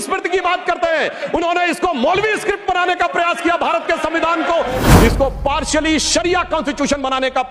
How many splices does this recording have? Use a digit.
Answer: 1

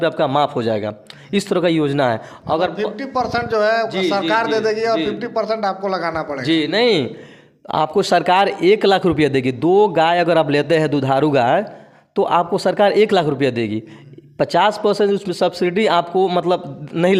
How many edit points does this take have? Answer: 0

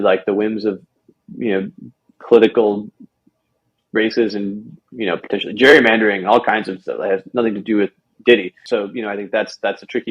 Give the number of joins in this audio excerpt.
1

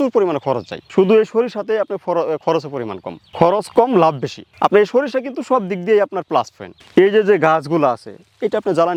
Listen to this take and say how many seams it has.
0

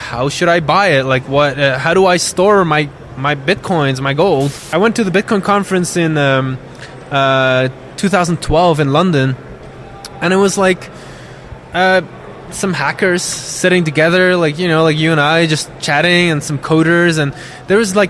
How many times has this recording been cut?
1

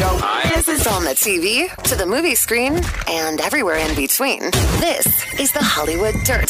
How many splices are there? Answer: 0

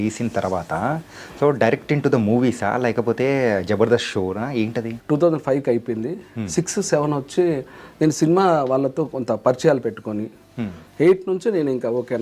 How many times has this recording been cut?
1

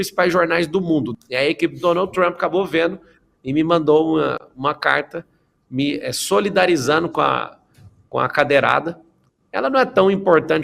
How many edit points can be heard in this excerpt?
1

